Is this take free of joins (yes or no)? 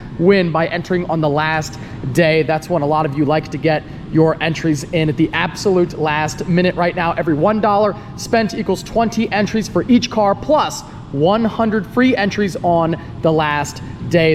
yes